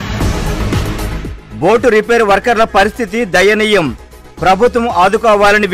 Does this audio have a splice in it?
no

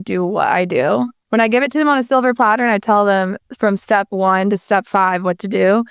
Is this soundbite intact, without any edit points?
no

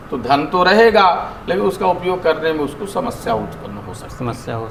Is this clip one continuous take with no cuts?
yes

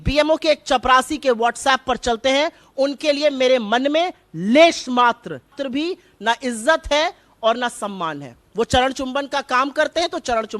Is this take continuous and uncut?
no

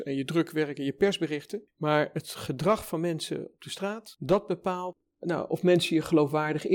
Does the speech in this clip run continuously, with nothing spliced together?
no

